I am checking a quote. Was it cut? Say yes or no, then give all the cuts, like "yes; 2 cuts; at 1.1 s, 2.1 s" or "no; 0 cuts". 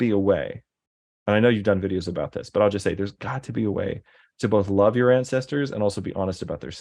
no; 0 cuts